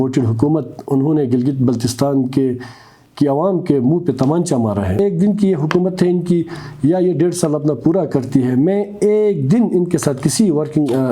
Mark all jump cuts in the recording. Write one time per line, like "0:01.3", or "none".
0:05.0